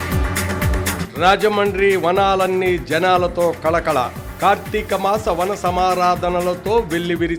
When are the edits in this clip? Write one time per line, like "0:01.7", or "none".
0:00.9